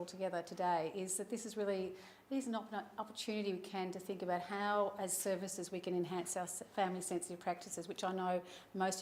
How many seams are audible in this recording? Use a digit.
0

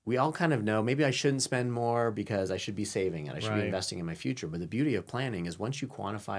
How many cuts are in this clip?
0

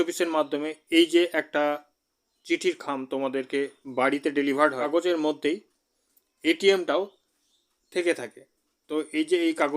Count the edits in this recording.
1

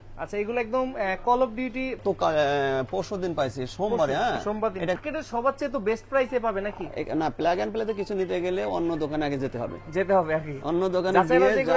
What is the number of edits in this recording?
2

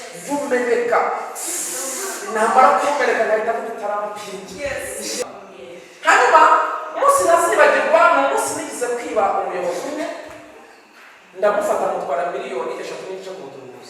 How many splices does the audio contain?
1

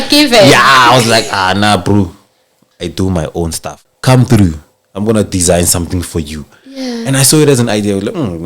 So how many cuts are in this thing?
1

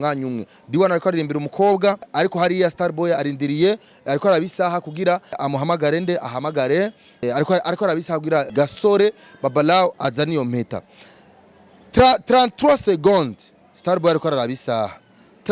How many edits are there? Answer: 4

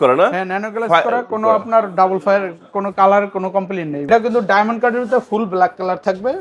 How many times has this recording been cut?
1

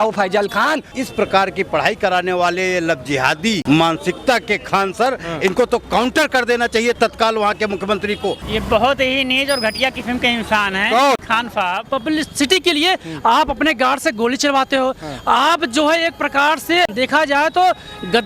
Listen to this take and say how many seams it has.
6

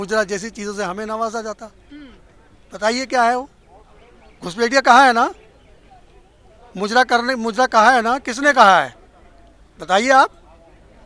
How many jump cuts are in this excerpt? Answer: 0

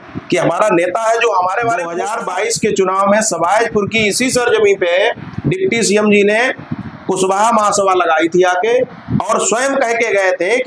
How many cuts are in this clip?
1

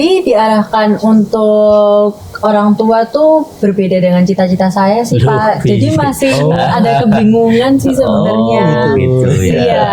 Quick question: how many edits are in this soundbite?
0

